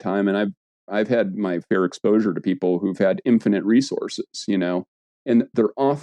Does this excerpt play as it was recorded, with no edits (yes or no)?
yes